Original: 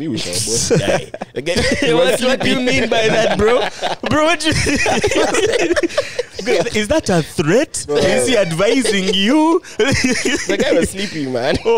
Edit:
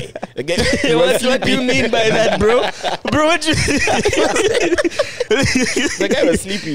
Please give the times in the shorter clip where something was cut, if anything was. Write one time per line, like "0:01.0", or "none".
0:05.2